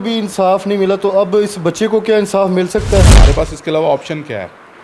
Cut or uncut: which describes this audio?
cut